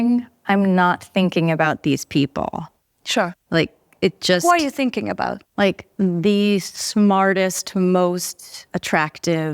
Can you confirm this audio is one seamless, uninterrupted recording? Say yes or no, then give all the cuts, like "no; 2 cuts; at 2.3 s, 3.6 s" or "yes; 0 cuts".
no; 1 cut; at 8.6 s